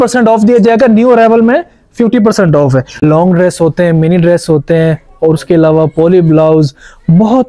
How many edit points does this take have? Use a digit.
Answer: 1